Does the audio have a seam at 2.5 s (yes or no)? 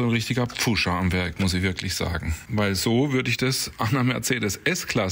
no